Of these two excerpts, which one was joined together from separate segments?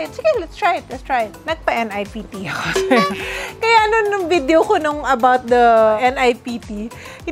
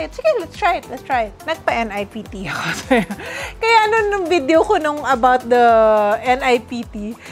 first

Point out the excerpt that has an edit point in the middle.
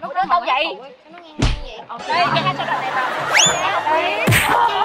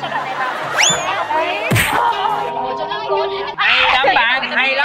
second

